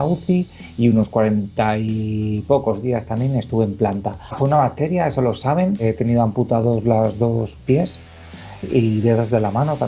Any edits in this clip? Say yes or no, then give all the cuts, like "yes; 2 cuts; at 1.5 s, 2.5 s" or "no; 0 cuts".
yes; 1 cut; at 5.8 s